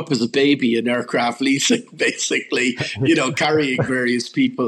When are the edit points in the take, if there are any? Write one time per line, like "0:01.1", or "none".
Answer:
none